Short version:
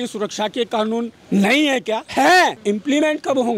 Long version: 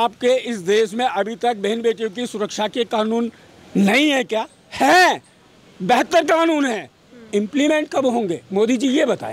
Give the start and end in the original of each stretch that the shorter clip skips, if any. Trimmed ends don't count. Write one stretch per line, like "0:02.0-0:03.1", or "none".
0:03.4-0:03.6
0:04.5-0:04.7
0:05.2-0:07.3

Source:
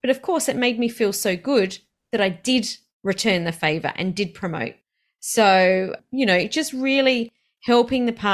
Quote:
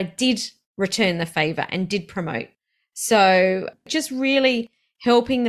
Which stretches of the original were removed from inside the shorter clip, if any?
0:06.1-0:06.5

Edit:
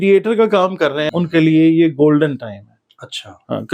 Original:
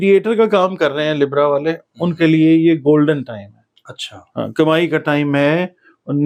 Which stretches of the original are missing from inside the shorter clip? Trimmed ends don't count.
0:01.0-0:01.9

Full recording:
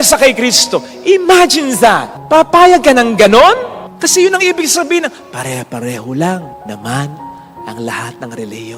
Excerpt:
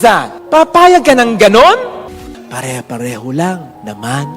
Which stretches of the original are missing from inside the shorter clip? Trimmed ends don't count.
0:04.0-0:05.1

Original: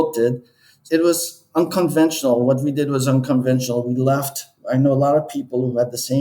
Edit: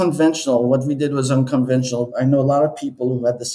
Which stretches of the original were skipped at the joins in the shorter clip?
0:03.8-0:04.6

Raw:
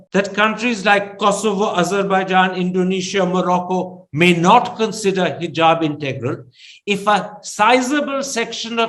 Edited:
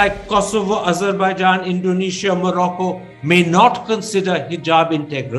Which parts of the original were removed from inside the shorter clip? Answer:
none

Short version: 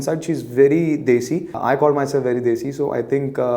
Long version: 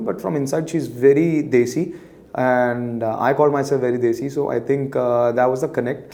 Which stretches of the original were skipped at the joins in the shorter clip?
0:02.0-0:03.1

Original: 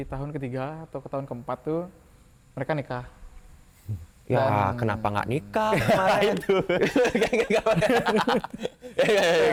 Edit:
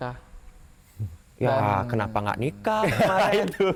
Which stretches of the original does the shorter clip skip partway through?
none

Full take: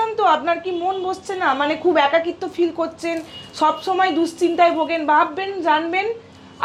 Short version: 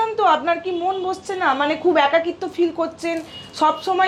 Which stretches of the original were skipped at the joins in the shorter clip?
none

